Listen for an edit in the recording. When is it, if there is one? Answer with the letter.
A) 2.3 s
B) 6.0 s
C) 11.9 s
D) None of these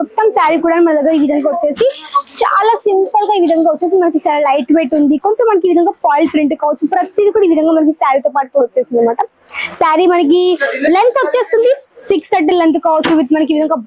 D